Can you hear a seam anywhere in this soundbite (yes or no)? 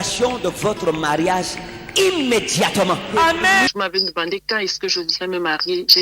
yes